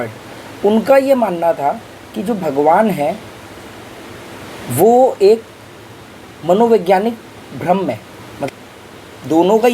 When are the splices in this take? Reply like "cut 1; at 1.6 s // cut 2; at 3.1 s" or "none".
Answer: cut 1; at 8.3 s